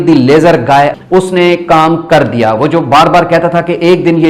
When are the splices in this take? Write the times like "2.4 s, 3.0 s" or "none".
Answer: none